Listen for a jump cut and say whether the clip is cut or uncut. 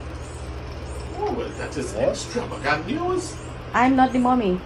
uncut